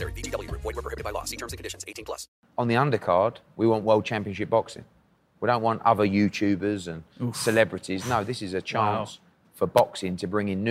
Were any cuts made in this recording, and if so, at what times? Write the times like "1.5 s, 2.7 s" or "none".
2.3 s